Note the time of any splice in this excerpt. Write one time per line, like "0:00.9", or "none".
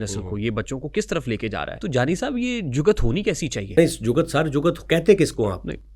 0:01.7
0:03.6